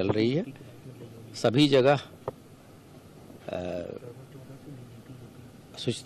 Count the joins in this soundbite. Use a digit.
0